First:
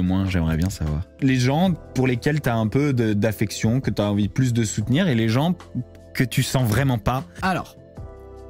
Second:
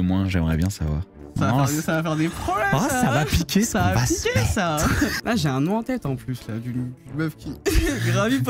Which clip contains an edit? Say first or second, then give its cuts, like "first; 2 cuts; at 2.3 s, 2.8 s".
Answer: second; 2 cuts; at 1.2 s, 5.3 s